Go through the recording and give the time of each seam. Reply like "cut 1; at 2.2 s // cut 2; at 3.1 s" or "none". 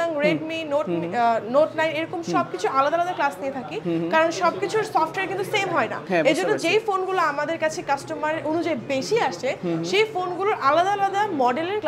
none